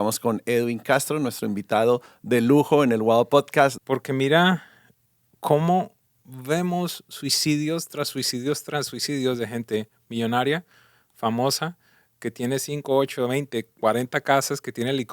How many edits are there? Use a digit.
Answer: 1